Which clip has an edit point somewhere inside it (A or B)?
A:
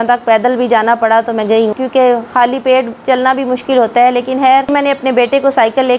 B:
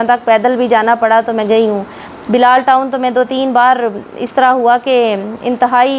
A